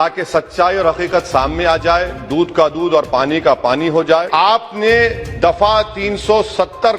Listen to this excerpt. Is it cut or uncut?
cut